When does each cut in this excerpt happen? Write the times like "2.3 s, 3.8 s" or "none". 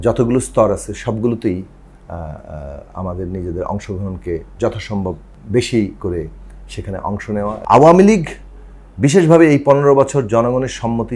5.3 s, 7.5 s